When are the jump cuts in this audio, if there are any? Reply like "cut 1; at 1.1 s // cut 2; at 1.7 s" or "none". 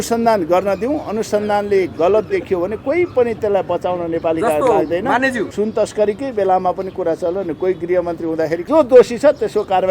cut 1; at 5.4 s // cut 2; at 8.7 s